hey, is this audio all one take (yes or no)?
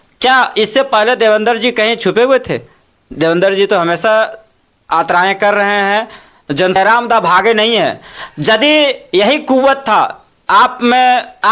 no